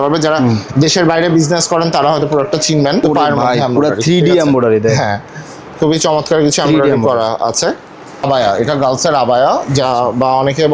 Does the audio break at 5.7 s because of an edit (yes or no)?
no